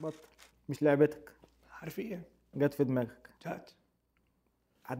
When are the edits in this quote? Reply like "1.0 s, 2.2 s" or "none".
none